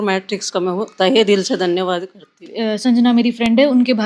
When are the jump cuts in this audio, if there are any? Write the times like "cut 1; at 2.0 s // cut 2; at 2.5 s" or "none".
cut 1; at 2.5 s